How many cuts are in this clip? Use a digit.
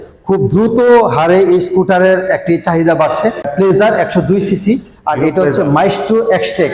1